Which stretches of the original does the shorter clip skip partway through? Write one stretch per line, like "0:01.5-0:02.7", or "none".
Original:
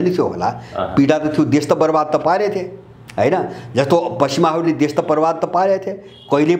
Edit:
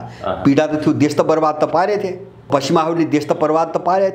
0:02.9-0:04.1

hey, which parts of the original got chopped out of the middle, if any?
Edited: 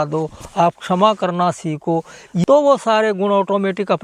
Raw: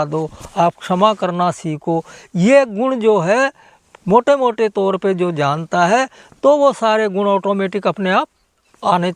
0:02.4-0:06.4

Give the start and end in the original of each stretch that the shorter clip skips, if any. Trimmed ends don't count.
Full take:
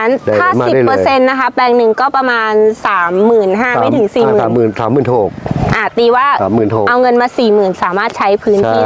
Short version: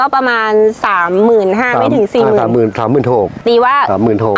0:05.4-0:05.9

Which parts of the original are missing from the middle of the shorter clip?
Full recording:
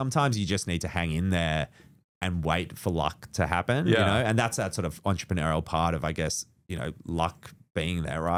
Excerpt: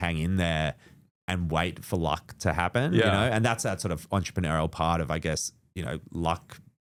none

